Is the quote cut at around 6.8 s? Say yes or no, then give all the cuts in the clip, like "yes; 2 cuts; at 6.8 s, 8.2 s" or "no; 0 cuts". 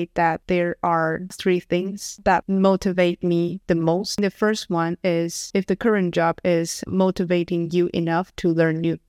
yes; 2 cuts; at 4.2 s, 6.8 s